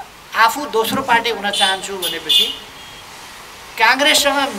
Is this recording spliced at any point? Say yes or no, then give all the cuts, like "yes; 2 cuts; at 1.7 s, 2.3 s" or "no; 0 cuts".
no; 0 cuts